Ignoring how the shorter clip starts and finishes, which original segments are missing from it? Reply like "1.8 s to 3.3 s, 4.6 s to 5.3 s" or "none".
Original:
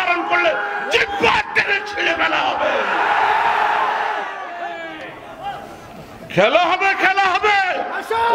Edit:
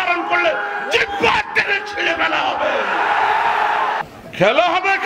4.0 s to 6.0 s